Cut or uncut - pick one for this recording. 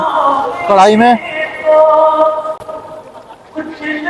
uncut